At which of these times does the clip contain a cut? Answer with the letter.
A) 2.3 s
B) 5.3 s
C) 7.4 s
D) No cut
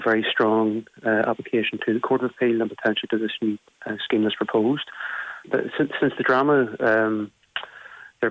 B